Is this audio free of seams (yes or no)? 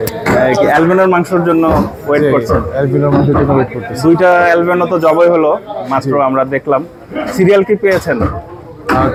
yes